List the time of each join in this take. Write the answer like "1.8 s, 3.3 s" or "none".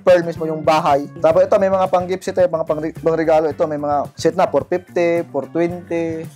1.1 s, 2.9 s, 4.1 s